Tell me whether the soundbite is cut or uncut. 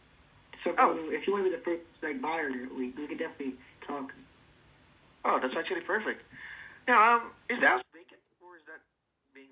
uncut